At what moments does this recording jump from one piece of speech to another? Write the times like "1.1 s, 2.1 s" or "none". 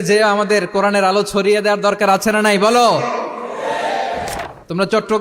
4.3 s